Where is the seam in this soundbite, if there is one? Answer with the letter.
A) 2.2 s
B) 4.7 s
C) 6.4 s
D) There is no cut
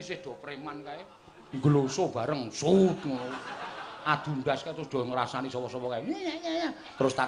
D